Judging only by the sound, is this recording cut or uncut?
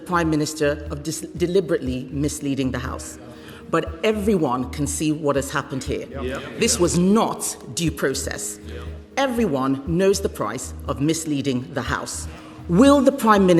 uncut